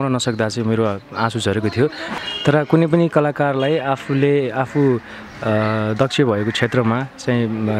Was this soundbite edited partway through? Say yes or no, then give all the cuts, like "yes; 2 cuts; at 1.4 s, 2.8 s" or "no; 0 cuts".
yes; 1 cut; at 2.2 s